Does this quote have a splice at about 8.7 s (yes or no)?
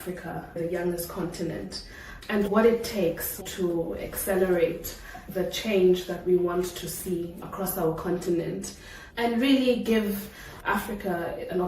no